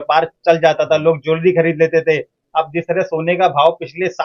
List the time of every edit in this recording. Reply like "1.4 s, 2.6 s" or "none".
none